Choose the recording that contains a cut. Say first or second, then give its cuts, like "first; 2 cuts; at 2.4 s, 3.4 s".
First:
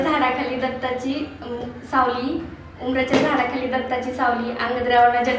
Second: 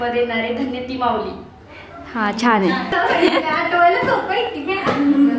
second; 1 cut; at 2.9 s